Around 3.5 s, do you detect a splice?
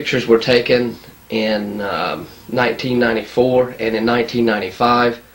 yes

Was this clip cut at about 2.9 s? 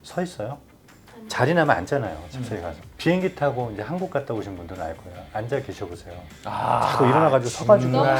yes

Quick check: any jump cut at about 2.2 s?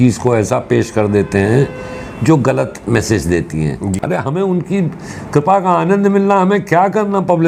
no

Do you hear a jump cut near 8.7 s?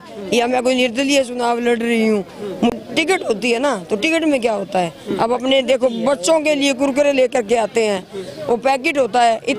no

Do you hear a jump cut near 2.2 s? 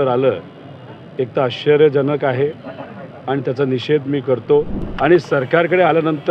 no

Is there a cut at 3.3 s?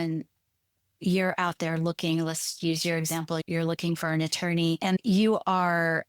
no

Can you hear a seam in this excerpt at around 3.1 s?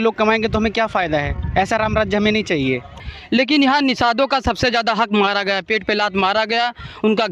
yes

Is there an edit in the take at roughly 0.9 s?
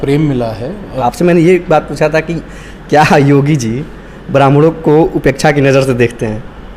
yes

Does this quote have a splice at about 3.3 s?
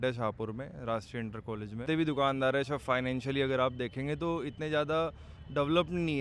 no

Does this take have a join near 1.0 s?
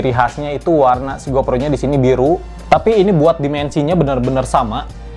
no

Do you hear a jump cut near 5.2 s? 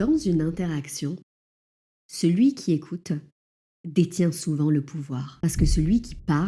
yes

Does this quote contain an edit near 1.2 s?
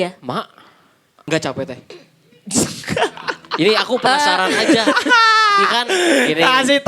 yes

